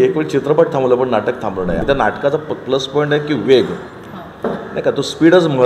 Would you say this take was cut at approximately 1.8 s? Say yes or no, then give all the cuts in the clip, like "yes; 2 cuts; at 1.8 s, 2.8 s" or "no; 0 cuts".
yes; 1 cut; at 1.8 s